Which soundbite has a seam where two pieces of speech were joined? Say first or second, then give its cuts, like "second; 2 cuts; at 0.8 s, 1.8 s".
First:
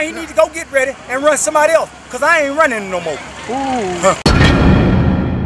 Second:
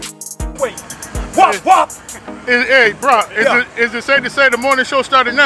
first; 1 cut; at 4.2 s